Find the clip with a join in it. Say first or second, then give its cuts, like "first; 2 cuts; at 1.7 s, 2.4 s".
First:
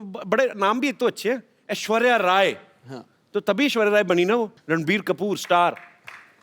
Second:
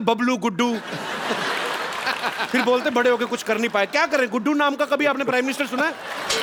first; 1 cut; at 4.6 s